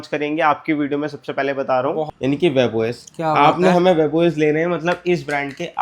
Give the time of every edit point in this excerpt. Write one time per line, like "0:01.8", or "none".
0:02.1